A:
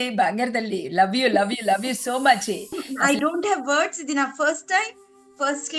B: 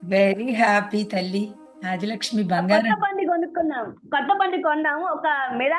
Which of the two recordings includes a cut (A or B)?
A